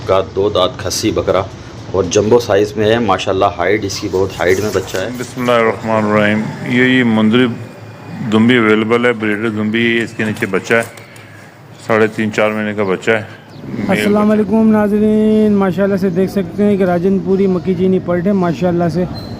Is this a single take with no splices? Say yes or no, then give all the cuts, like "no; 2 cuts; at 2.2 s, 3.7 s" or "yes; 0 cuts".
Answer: no; 2 cuts; at 5.4 s, 13.8 s